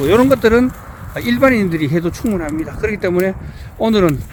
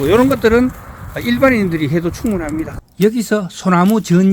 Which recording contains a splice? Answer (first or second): second